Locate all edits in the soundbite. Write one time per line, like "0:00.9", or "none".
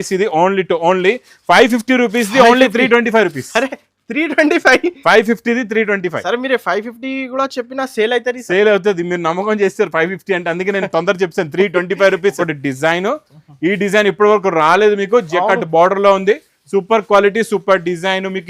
0:12.5